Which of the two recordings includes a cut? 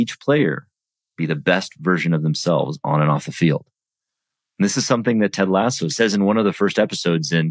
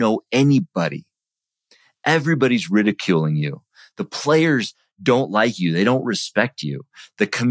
first; 1 cut; at 5.8 s

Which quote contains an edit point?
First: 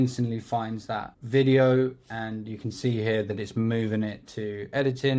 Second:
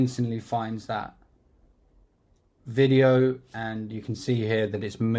first; 1 cut; at 1.2 s

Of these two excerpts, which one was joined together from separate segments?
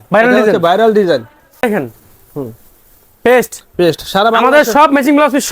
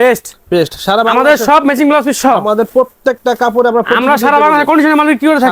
first; 1 cut; at 1.6 s

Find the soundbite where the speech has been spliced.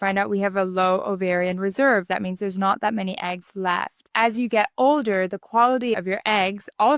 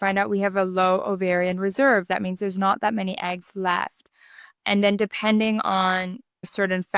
first; 1 cut; at 4.0 s

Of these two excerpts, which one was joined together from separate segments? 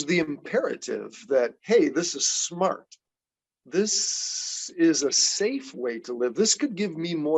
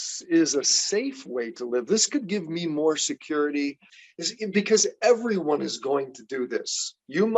second; 1 cut; at 3.9 s

